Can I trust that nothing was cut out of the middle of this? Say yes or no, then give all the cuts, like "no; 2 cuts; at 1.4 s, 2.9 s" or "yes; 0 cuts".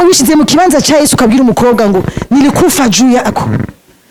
yes; 0 cuts